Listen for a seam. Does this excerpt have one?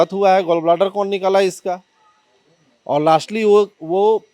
no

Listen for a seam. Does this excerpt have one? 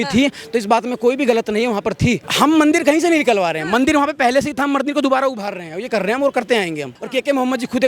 yes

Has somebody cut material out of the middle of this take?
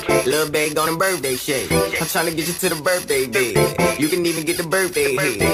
no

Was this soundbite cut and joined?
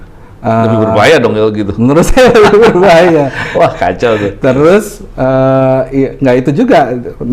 no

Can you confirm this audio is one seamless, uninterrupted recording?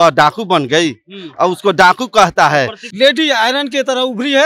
no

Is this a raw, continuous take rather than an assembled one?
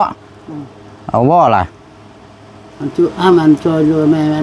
yes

